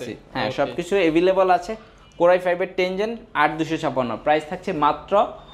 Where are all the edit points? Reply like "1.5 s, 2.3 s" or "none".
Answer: none